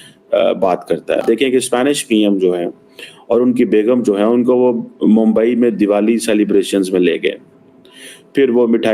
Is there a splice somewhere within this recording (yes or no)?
yes